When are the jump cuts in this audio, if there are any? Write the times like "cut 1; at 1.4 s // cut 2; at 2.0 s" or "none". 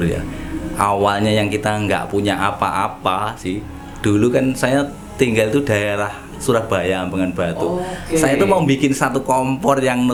none